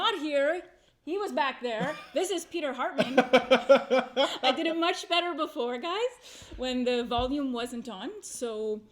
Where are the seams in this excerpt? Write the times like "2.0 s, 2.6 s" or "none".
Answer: none